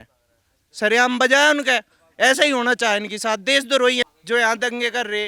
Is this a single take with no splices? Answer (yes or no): no